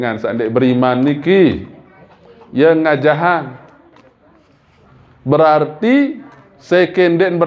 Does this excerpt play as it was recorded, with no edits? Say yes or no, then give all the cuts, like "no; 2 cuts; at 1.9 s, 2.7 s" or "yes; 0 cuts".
yes; 0 cuts